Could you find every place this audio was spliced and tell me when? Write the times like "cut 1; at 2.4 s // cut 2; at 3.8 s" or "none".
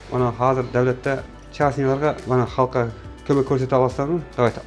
cut 1; at 1.4 s // cut 2; at 2.2 s